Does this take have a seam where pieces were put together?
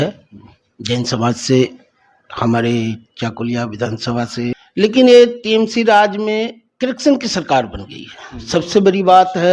yes; 1 cut; at 4.6 s

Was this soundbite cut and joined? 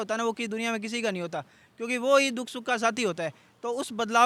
no; 0 cuts

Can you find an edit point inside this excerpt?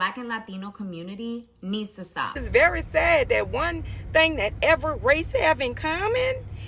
yes; 1 cut; at 2.3 s

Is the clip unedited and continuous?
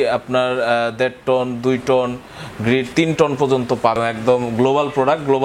no; 1 cut; at 4.0 s

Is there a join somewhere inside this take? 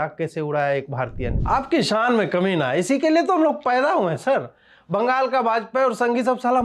yes; 1 cut; at 1.3 s

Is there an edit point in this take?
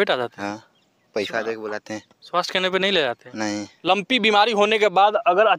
yes; 1 cut; at 3.7 s

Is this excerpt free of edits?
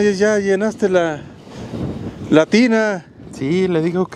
yes; 0 cuts

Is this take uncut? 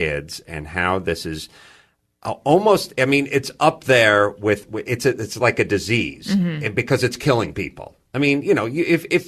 no; 1 cut; at 1.0 s

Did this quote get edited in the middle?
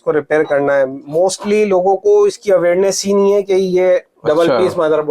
yes; 1 cut; at 4.1 s

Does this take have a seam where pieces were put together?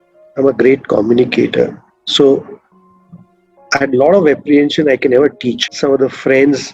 yes; 1 cut; at 5.7 s

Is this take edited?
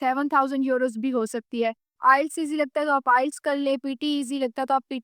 yes; 1 cut; at 1.9 s

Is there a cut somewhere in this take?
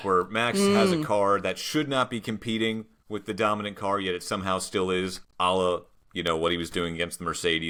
no; 0 cuts

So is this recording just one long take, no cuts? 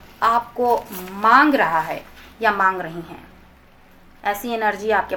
yes; 0 cuts

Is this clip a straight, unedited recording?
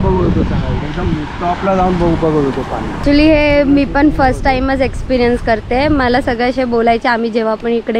no; 1 cut; at 3.0 s

